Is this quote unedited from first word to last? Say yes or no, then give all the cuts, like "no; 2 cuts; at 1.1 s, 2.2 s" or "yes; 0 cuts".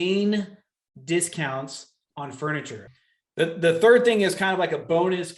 no; 1 cut; at 2.9 s